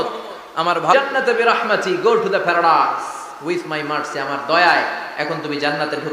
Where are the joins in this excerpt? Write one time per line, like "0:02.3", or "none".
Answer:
0:00.9